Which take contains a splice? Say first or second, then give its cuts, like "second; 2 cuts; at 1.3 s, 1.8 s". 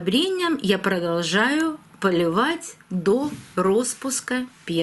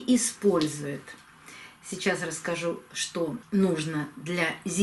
second; 1 cut; at 3.4 s